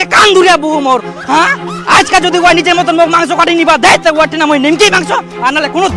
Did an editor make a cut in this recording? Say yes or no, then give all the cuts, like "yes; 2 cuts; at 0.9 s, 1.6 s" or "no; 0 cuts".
no; 0 cuts